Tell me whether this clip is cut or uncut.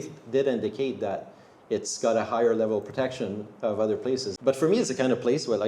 cut